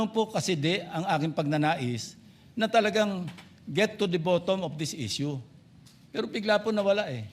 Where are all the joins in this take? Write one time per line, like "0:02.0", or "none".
none